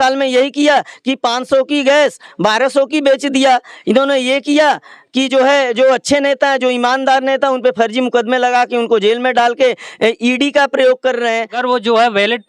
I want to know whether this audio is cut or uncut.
cut